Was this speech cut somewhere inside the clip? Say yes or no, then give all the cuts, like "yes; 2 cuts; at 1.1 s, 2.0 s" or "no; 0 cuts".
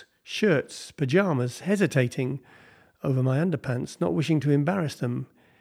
no; 0 cuts